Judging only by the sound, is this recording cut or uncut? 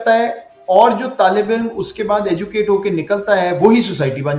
uncut